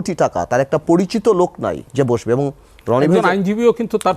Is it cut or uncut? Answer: cut